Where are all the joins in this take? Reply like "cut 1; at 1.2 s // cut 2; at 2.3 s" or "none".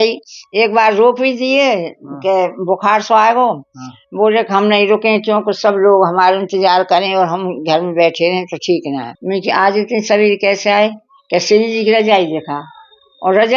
cut 1; at 9.1 s